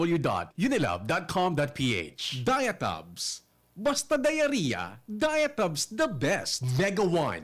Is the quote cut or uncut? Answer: cut